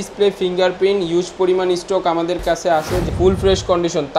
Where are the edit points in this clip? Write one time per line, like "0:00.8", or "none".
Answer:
0:03.0